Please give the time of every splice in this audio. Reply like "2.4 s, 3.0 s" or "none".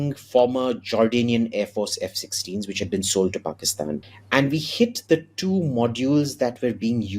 none